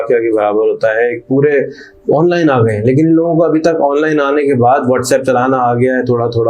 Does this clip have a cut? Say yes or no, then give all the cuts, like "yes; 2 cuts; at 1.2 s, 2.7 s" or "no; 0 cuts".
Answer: no; 0 cuts